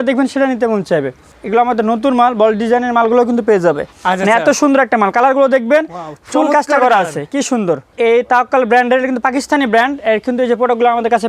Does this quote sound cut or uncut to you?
cut